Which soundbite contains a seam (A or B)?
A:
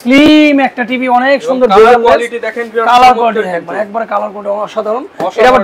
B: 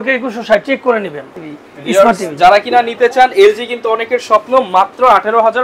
B